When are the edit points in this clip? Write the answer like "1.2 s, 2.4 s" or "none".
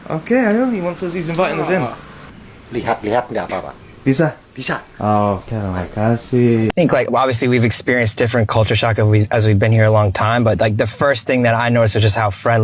6.7 s